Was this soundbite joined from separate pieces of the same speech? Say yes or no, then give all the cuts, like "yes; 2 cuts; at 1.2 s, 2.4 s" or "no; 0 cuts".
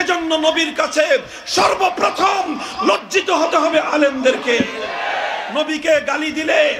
yes; 1 cut; at 5.4 s